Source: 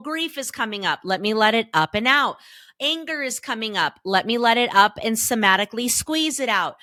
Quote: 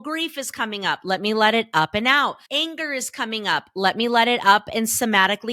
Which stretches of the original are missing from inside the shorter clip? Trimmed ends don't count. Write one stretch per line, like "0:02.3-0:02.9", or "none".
0:02.4-0:02.7